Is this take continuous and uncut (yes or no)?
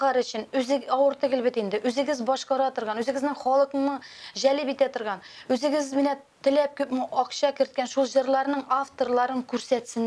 yes